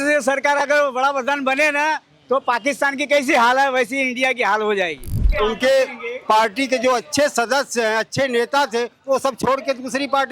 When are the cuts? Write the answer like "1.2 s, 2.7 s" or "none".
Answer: 5.3 s